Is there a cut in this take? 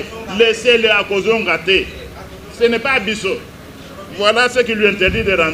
no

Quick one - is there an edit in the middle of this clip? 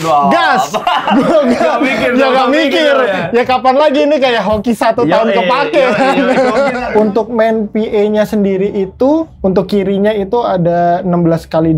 yes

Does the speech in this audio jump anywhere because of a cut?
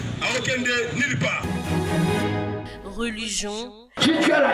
yes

